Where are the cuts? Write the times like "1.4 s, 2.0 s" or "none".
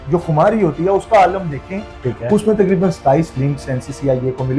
2.0 s